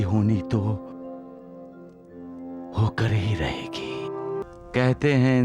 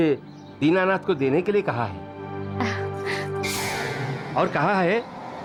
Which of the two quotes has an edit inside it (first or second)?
first